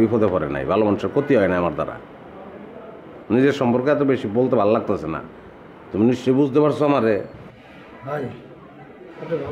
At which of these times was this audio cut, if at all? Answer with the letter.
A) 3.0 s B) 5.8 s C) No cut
A